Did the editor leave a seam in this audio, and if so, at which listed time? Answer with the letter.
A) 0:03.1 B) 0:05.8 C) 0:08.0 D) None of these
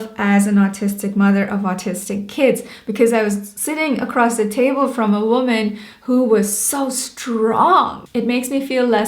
C